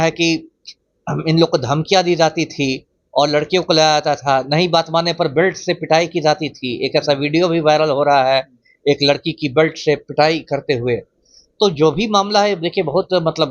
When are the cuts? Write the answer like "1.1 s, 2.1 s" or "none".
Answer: none